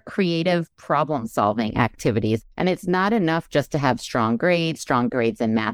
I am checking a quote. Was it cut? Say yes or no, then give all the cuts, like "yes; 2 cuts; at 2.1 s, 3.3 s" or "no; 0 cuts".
yes; 1 cut; at 2.4 s